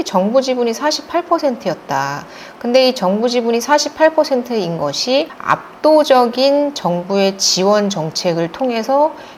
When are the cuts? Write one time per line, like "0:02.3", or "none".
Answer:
none